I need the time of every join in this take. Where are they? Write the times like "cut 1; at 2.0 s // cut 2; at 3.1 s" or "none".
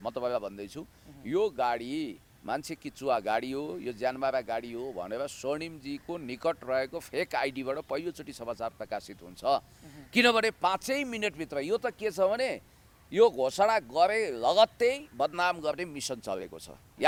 none